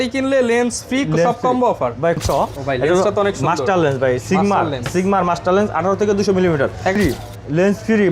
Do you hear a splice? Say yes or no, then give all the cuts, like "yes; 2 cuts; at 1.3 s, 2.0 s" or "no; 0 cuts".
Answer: yes; 2 cuts; at 2.2 s, 7.0 s